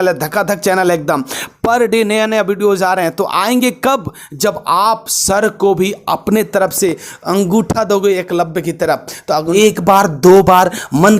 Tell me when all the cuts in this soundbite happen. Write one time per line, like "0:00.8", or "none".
0:09.5